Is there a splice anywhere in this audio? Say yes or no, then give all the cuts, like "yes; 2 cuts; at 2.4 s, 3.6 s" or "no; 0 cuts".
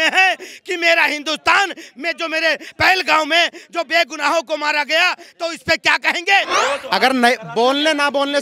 yes; 1 cut; at 6.5 s